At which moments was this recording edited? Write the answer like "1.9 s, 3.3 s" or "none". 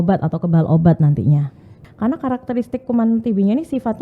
1.8 s